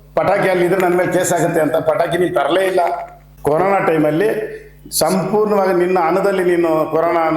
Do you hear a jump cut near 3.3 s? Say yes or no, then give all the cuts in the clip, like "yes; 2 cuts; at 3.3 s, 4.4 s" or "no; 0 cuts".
yes; 1 cut; at 3.3 s